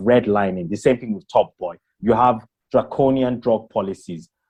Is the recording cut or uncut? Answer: uncut